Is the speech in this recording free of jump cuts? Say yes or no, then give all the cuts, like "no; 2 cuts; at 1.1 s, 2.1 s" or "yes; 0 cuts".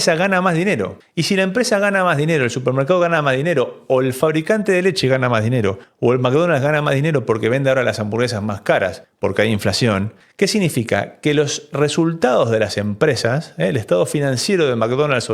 yes; 0 cuts